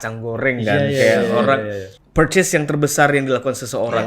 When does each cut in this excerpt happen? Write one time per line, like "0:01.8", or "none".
0:02.0